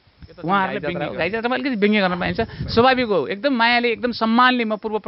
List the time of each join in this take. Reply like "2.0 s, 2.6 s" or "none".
1.0 s